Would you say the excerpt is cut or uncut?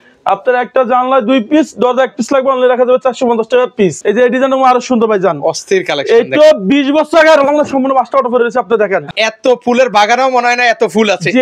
cut